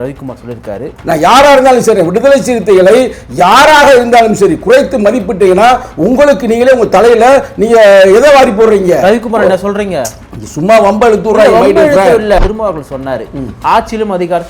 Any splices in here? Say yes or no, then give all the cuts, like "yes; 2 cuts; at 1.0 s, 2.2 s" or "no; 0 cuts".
yes; 2 cuts; at 1.0 s, 12.4 s